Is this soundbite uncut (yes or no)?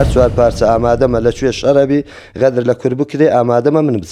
yes